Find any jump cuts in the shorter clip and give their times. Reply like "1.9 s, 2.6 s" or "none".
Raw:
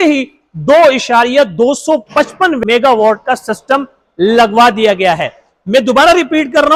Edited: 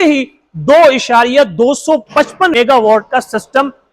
2.5 s